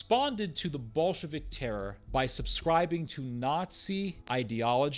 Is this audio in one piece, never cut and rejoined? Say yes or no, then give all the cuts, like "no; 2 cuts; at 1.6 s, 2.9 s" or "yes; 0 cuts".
no; 2 cuts; at 2.0 s, 4.2 s